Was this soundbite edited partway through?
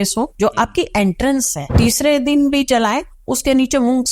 yes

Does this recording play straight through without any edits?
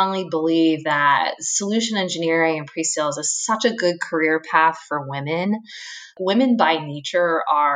no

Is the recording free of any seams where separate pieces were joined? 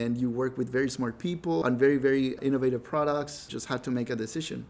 no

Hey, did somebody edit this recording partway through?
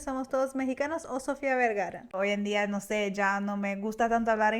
yes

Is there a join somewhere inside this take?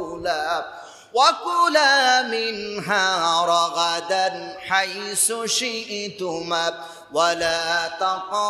no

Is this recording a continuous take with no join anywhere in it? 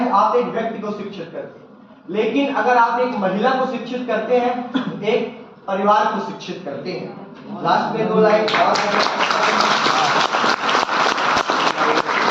yes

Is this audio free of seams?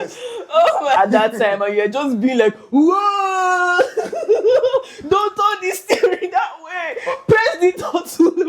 no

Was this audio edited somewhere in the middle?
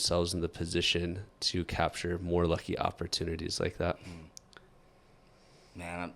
no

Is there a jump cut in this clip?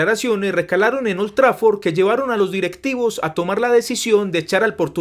no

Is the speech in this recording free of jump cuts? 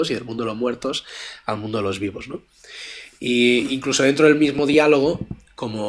yes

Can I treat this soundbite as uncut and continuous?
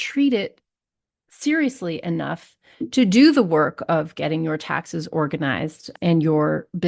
no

